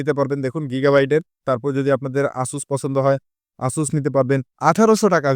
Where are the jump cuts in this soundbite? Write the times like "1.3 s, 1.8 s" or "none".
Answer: 1.4 s, 4.5 s